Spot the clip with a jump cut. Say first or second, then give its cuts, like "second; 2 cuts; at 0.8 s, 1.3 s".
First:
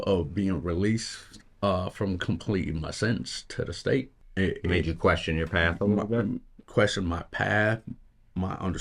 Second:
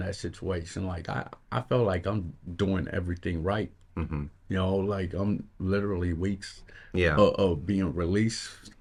first; 1 cut; at 4.2 s